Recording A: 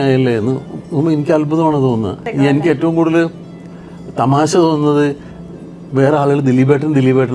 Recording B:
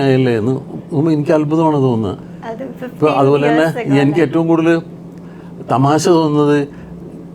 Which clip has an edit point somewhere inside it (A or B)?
A